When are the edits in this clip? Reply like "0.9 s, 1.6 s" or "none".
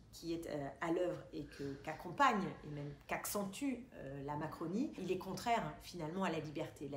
5.0 s

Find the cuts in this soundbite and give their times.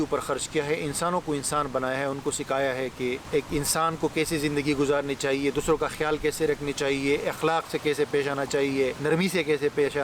3.2 s, 9.0 s

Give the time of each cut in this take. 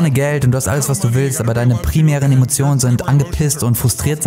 none

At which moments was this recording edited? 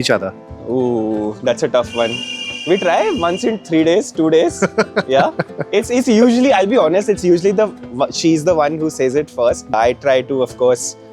9.7 s

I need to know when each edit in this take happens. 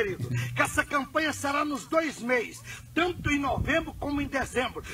none

